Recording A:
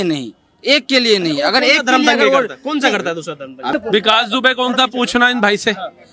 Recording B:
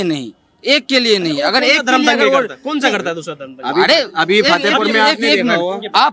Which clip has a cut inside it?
A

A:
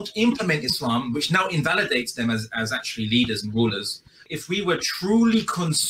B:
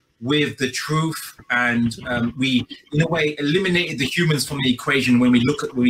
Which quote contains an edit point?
A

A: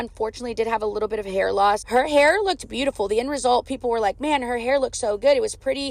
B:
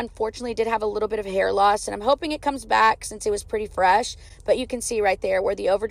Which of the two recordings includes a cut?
A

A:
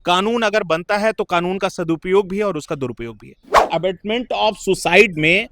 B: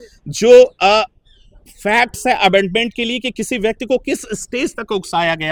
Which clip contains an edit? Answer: A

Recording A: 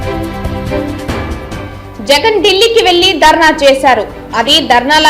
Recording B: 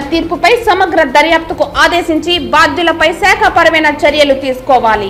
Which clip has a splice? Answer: A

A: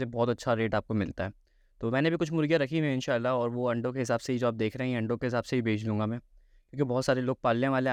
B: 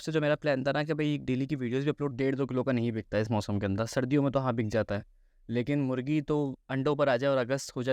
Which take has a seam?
B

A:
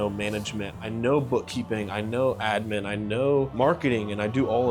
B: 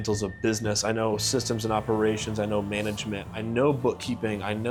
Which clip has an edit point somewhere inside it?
A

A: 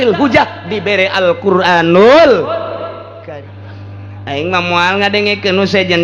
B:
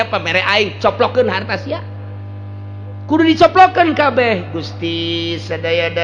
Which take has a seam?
A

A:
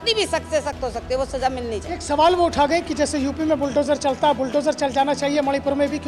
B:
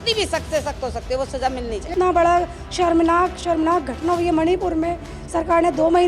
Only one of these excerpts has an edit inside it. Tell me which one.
B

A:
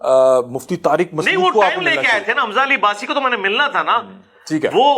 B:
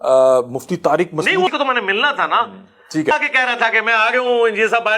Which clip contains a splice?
B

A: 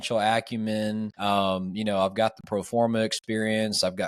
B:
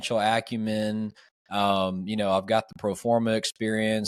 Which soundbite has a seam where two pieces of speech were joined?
A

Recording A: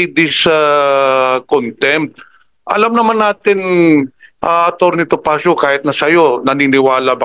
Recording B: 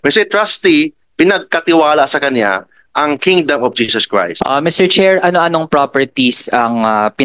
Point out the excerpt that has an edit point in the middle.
B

